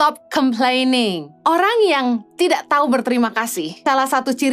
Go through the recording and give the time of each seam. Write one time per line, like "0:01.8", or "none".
0:01.3
0:03.7